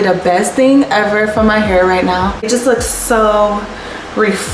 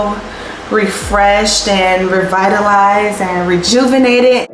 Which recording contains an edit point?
first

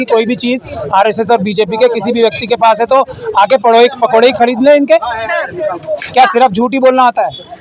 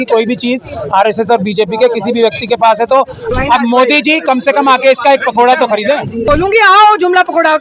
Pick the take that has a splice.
second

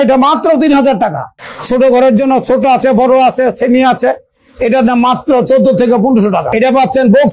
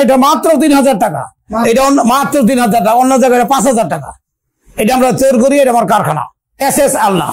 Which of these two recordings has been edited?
first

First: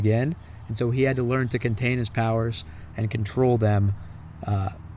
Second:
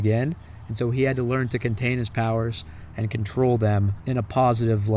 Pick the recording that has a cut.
second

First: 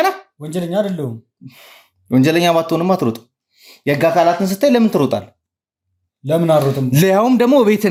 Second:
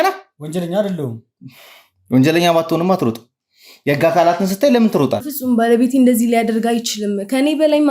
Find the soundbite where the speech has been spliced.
second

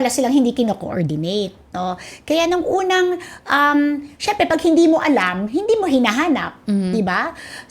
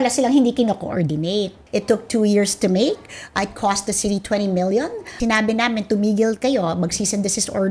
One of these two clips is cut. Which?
second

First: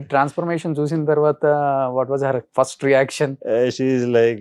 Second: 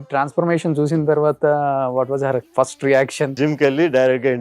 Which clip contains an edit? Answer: second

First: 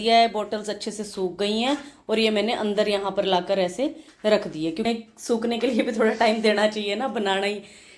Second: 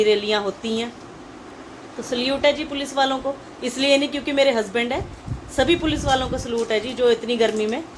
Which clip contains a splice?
first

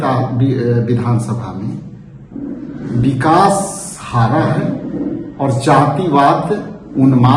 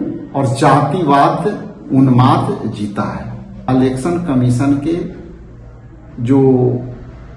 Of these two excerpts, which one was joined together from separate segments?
second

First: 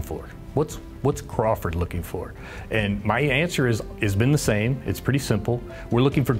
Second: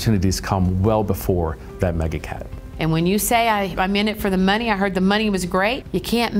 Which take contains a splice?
second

